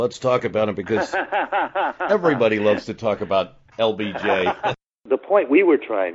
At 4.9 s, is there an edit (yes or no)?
yes